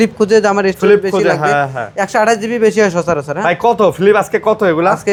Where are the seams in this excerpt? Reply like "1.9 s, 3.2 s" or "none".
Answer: none